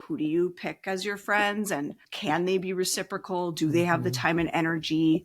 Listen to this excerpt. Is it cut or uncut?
uncut